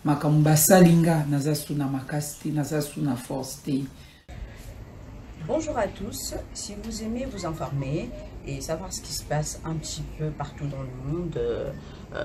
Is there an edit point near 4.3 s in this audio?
yes; 1 cut; at 4.3 s

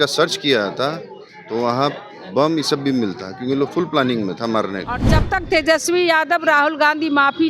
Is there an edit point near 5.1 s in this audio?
yes; 1 cut; at 5.1 s

